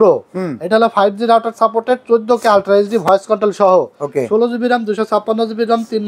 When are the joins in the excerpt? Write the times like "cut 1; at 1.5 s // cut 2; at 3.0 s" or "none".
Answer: none